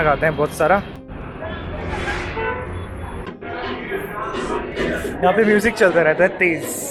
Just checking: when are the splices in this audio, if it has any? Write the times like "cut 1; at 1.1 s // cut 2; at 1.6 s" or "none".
none